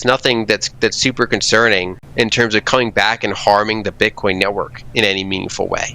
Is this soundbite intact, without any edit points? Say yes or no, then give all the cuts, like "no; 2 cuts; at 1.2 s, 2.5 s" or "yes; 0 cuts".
no; 1 cut; at 2.0 s